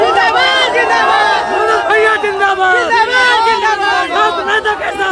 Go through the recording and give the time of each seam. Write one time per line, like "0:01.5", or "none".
none